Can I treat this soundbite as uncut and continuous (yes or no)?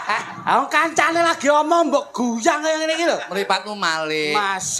yes